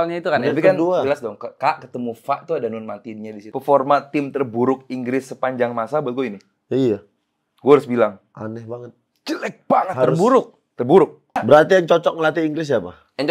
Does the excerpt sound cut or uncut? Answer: cut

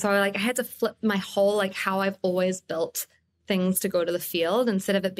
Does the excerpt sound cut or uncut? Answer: uncut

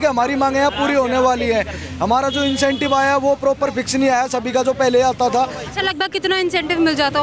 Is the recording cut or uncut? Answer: uncut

